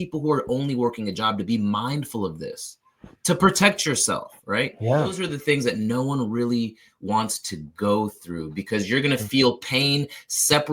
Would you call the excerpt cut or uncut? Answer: cut